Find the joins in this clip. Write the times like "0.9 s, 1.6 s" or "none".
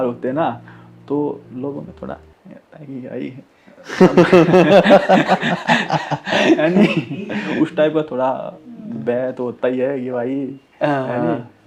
none